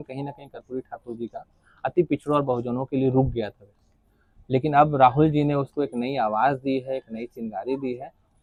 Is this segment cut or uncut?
uncut